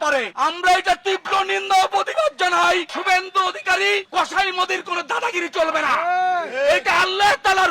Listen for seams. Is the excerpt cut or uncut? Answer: cut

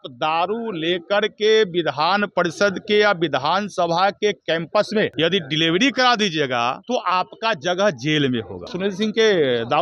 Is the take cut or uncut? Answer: cut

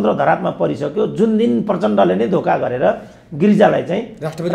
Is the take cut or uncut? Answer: uncut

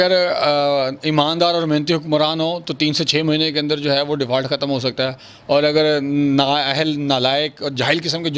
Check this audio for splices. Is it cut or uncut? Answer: uncut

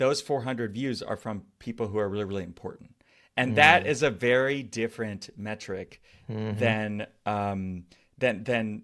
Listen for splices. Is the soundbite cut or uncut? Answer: uncut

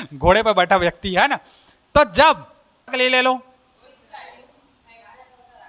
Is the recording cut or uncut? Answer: cut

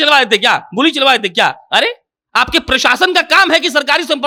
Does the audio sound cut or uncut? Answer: uncut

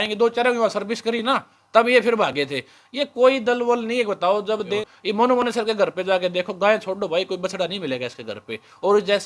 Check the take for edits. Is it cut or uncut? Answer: cut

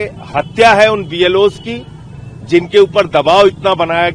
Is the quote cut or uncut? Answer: uncut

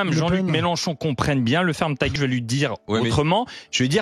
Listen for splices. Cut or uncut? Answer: cut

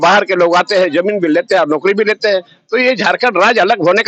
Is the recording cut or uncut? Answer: uncut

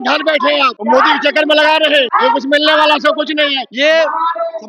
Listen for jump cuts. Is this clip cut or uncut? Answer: cut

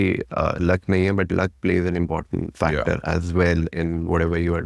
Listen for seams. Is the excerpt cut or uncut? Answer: uncut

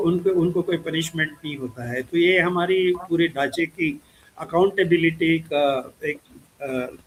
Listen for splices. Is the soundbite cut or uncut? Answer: uncut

